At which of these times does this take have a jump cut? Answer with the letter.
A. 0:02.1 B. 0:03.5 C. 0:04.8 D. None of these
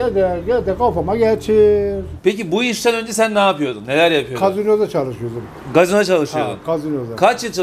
A